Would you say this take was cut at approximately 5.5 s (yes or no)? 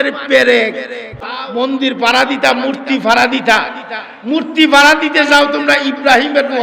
no